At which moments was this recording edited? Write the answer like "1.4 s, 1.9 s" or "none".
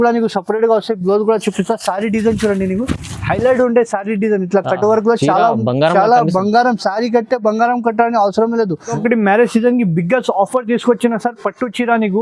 9.0 s